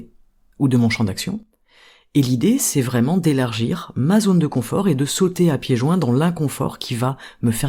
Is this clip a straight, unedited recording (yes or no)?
yes